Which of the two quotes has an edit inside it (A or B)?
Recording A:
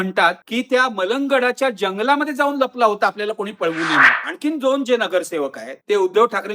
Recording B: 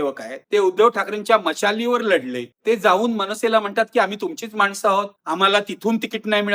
A